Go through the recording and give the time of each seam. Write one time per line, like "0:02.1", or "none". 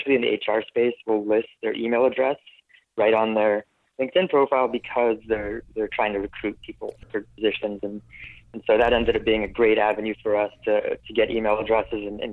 none